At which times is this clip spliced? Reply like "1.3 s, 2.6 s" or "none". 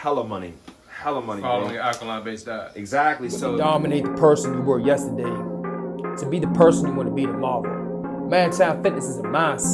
3.4 s

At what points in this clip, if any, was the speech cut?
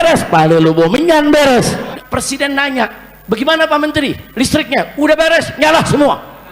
1.9 s

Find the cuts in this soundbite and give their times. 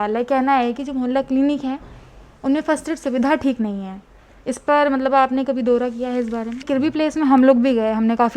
6.6 s

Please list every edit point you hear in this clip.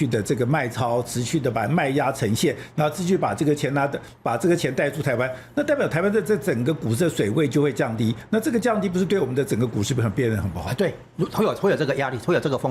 none

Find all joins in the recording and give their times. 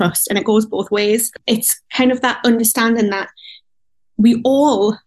none

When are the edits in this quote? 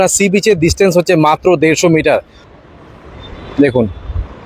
2.4 s

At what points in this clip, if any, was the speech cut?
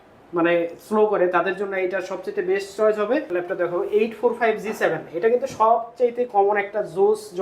3.3 s

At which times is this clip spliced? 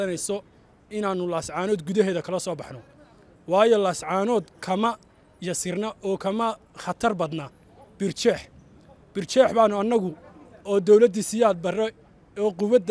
none

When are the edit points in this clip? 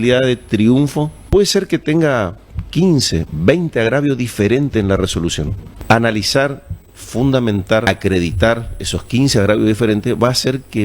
1.2 s, 5.6 s, 7.9 s

